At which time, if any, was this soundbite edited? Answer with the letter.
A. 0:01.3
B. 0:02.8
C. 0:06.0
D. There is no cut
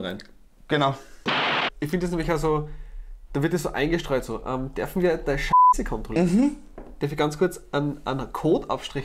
A